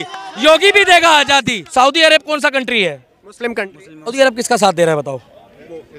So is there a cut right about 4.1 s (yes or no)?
yes